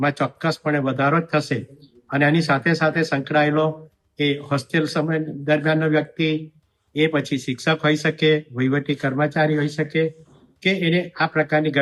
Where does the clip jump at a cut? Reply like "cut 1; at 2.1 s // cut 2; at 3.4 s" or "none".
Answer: none